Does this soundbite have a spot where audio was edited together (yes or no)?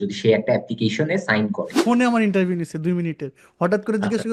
yes